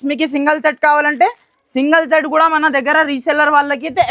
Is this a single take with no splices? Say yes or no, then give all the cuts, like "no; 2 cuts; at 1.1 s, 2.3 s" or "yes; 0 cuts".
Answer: yes; 0 cuts